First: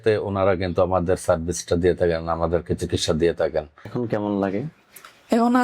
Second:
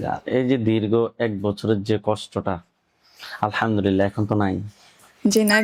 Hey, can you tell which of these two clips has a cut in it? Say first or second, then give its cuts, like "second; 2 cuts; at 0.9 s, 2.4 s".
first; 1 cut; at 3.9 s